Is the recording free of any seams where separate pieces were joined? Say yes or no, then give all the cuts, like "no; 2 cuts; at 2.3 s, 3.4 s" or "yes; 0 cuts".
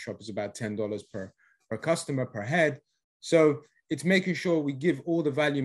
yes; 0 cuts